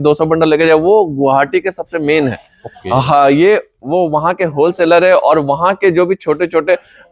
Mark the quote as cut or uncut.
uncut